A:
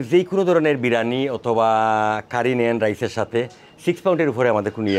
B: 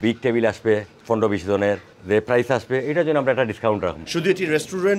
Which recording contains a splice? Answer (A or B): B